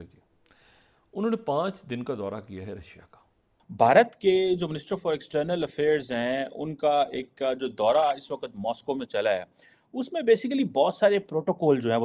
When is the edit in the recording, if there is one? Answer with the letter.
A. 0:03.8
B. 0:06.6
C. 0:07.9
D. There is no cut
A